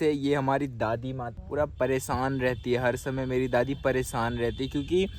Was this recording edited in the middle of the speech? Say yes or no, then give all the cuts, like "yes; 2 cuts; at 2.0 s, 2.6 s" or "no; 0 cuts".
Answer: yes; 1 cut; at 1.3 s